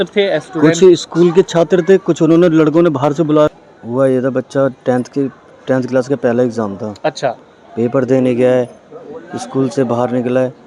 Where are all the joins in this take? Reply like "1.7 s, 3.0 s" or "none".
3.5 s